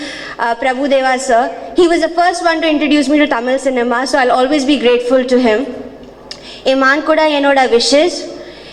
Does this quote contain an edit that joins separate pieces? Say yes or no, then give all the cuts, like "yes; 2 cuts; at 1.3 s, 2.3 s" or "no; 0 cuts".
no; 0 cuts